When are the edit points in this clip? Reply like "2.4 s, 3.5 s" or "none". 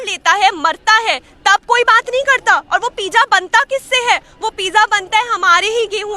none